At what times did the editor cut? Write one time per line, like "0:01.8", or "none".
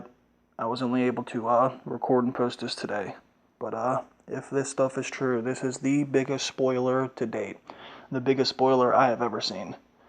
0:02.7